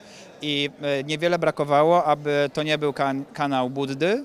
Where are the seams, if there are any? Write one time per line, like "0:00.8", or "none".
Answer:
none